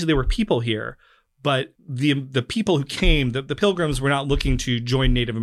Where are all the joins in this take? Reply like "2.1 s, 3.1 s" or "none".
1.8 s